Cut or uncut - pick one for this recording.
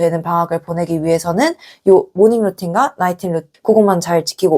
cut